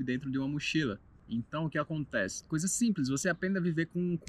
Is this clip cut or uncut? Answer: uncut